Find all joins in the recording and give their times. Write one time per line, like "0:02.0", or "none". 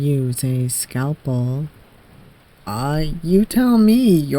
none